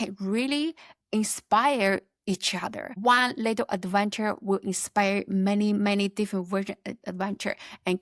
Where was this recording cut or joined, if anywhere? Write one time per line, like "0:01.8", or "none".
0:02.9